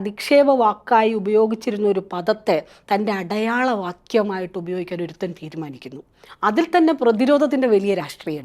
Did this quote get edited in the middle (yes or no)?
no